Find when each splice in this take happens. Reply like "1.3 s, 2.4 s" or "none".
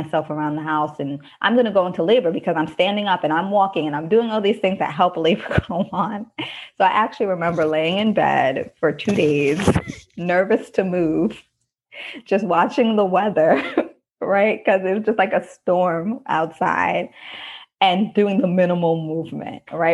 none